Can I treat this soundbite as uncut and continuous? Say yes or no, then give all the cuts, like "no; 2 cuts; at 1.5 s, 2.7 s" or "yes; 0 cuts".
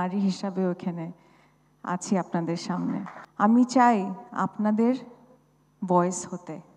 no; 1 cut; at 3.2 s